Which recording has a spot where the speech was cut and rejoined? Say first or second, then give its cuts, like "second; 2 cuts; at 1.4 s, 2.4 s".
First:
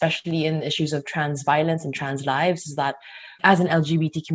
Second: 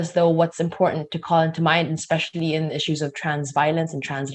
first; 1 cut; at 3.3 s